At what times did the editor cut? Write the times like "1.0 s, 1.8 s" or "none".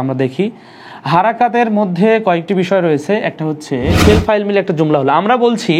3.9 s